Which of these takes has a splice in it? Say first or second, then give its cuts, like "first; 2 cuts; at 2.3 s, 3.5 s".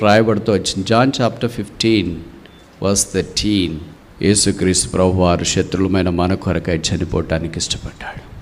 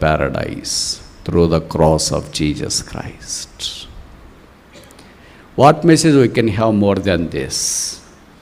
first; 1 cut; at 3.9 s